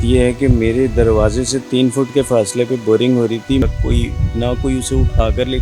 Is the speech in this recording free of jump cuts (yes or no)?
no